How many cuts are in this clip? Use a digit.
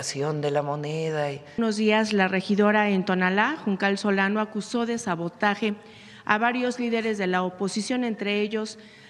1